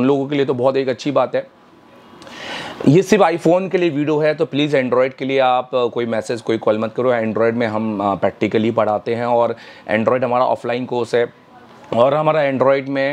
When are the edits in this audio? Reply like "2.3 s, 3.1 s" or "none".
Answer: none